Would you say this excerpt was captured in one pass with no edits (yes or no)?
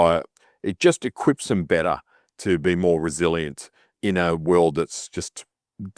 no